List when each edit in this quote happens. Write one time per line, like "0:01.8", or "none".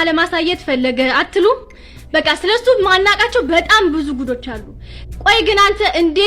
none